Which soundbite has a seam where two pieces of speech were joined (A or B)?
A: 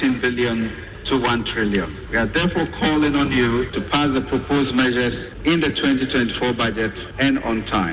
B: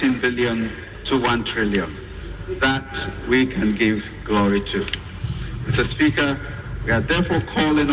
A